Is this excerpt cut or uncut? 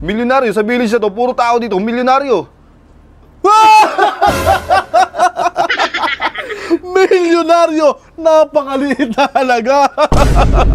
uncut